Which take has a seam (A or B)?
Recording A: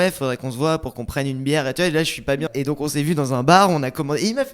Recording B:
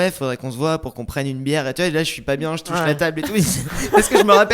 A